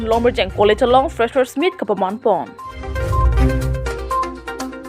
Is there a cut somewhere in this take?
yes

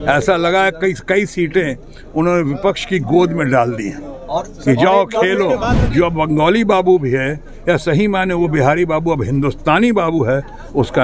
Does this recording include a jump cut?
yes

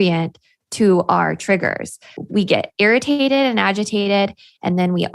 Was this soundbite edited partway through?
yes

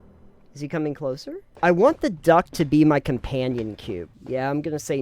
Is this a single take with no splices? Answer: no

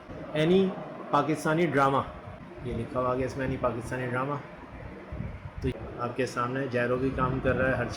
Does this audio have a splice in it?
yes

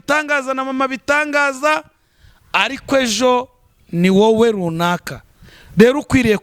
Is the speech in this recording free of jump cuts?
yes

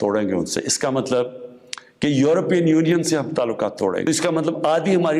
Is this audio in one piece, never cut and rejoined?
no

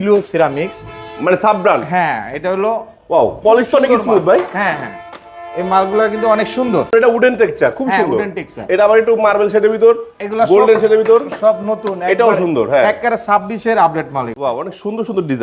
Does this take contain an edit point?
yes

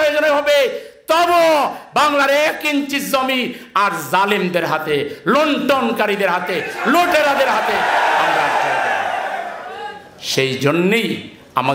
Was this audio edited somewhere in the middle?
no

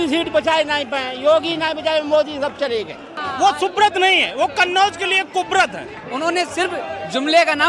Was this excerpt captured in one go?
no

